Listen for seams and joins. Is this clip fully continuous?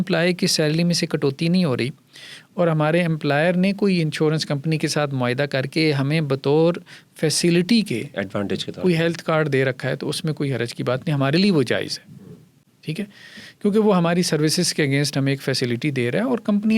yes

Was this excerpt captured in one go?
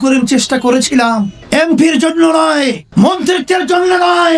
no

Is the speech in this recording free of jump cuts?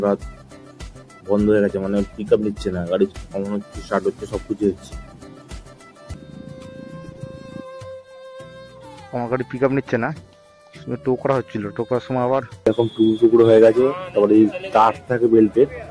no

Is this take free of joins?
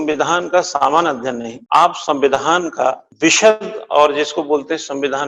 no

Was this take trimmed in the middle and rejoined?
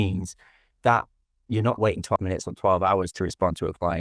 yes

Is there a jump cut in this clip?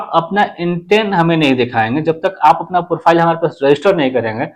no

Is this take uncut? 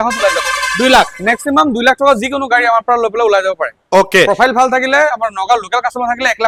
yes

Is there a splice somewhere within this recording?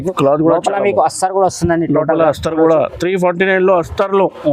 no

